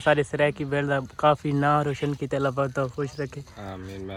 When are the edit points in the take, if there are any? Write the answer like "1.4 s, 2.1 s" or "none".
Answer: none